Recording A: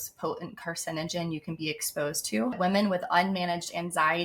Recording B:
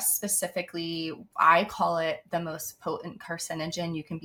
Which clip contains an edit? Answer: A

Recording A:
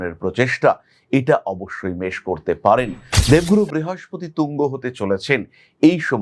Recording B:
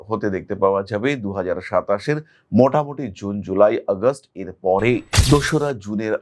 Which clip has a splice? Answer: B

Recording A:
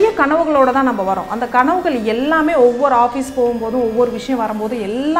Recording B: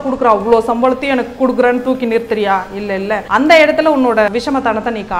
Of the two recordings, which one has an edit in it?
B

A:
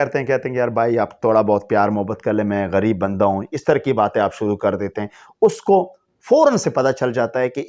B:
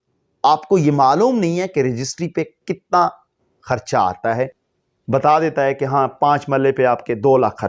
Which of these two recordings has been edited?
B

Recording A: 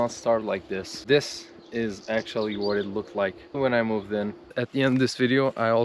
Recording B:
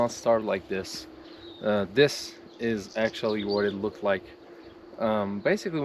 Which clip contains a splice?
A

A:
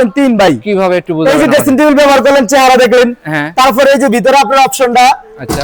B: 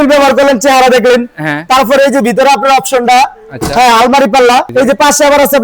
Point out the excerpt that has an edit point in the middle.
B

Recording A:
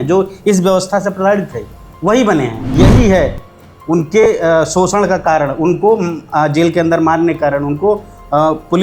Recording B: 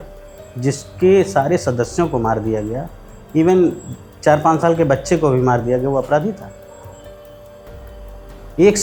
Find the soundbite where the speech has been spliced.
A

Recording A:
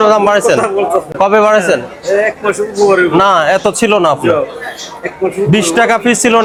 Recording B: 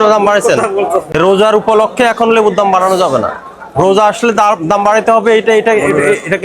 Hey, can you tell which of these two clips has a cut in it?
B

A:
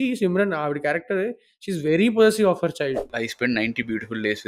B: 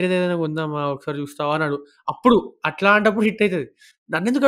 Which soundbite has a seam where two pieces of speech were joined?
A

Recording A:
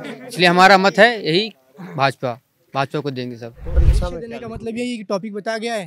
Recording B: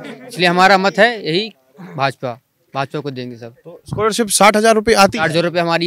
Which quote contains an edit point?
A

